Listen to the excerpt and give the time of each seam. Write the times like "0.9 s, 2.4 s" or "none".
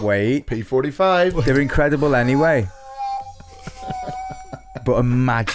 none